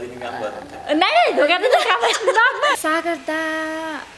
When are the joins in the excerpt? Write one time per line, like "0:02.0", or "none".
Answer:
0:02.7